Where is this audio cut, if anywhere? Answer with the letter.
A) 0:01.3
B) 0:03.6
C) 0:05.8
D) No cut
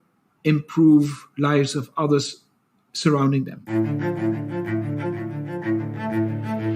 B